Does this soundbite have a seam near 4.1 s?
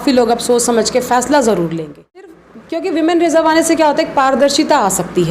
no; 1 cut; at 2.4 s

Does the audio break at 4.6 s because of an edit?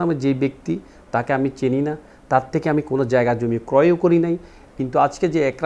yes; 1 cut; at 4.6 s

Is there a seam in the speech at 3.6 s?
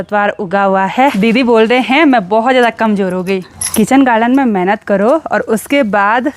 yes; 2 cuts; at 1.1 s, 3.6 s

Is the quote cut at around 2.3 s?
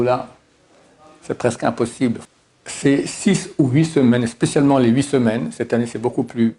yes; 1 cut; at 2.3 s

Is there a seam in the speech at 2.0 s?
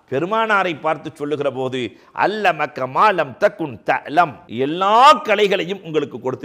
no; 1 cut; at 4.4 s

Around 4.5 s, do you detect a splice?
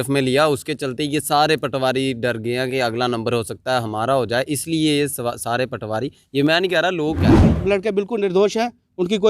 no; 1 cut; at 7.6 s

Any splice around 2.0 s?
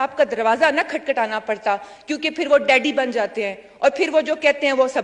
no; 0 cuts

